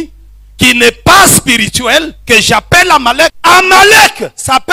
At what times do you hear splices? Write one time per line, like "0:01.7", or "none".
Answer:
0:03.4